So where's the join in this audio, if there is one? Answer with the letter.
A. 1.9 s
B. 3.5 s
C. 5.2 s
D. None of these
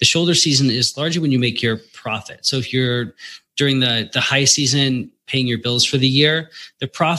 C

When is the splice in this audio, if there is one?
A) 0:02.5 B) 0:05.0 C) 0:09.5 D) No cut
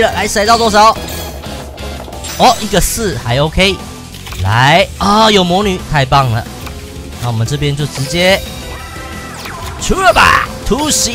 D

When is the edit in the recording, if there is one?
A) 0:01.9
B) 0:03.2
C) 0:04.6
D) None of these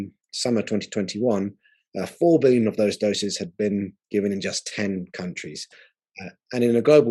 D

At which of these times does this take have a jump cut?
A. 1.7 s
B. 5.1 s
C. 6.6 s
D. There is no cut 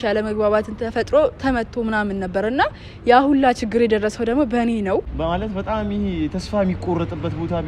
B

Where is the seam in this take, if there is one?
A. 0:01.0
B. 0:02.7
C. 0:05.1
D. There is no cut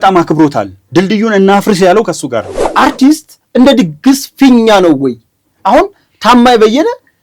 B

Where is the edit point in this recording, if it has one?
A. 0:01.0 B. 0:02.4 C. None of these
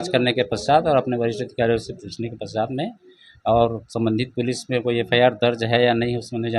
C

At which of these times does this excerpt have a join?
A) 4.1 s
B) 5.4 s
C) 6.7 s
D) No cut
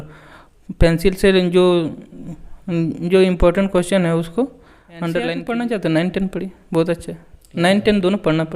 B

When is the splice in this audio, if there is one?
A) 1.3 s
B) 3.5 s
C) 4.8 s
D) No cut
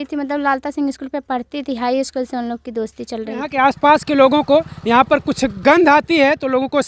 B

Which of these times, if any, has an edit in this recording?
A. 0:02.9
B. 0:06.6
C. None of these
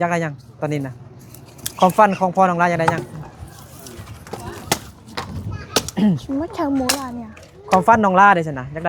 A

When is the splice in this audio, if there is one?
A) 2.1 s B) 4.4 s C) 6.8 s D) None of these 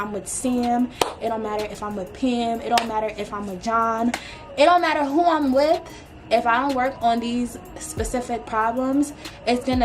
D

